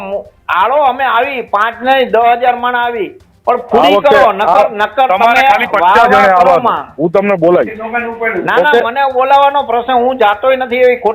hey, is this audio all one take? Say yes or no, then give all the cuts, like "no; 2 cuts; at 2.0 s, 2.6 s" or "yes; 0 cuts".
yes; 0 cuts